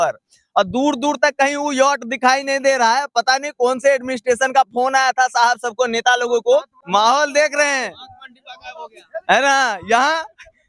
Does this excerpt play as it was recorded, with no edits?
no; 1 cut; at 6.8 s

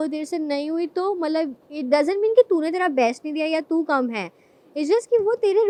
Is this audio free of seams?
yes; 0 cuts

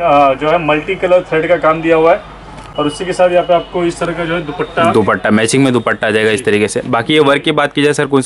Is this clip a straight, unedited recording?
yes; 0 cuts

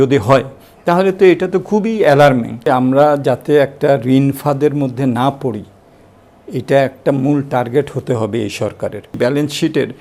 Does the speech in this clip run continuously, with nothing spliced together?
no; 2 cuts; at 2.6 s, 9.2 s

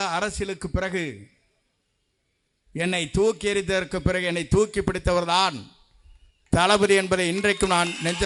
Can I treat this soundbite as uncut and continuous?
yes; 0 cuts

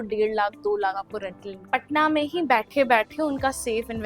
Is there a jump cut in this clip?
yes; 1 cut; at 1.6 s

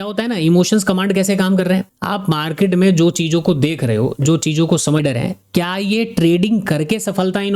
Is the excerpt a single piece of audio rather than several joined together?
no; 1 cut; at 5.0 s

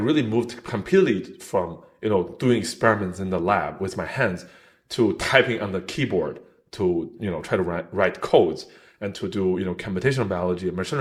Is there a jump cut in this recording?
no; 0 cuts

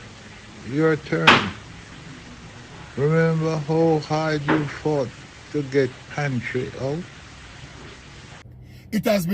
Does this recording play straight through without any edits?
no; 1 cut; at 8.3 s

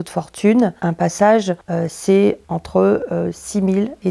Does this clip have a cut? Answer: yes; 2 cuts; at 1.6 s, 2.4 s

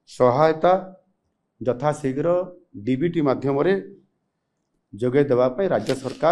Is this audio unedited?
yes; 0 cuts

